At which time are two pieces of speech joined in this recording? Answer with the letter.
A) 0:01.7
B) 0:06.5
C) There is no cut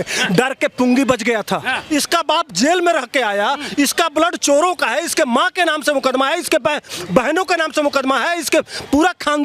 A